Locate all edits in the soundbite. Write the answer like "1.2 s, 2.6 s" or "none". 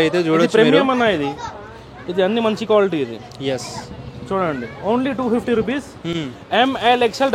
none